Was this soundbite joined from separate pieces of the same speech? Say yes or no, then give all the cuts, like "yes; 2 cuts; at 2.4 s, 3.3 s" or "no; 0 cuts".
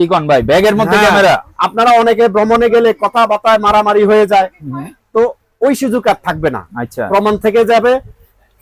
no; 0 cuts